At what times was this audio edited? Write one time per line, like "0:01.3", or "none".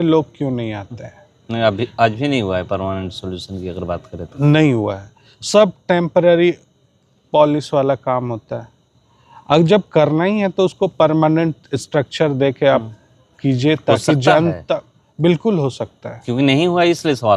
none